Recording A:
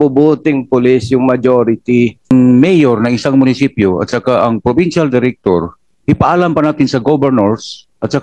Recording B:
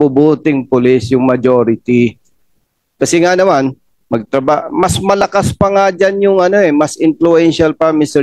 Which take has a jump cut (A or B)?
A